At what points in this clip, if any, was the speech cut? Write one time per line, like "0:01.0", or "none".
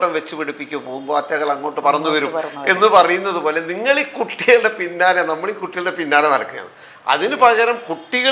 none